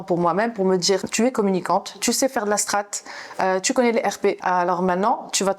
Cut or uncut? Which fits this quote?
cut